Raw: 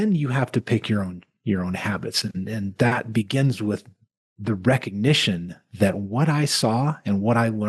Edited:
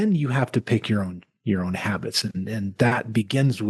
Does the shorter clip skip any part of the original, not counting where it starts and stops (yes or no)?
no